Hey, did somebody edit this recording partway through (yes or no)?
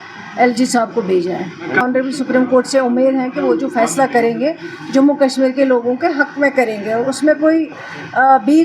yes